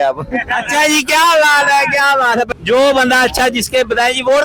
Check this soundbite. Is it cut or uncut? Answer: cut